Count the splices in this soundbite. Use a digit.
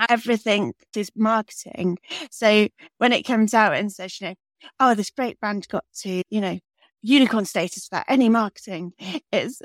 1